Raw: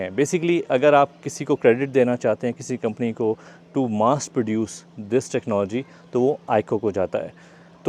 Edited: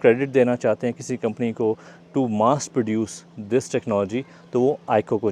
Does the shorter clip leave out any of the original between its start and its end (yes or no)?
no